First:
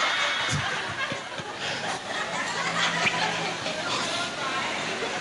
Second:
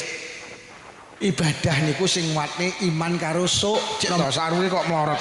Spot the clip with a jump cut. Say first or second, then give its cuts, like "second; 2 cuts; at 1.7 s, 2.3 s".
second; 1 cut; at 4.0 s